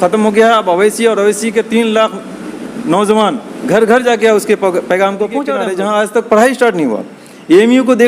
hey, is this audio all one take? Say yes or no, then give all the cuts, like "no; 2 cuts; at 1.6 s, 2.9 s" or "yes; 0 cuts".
no; 1 cut; at 5.6 s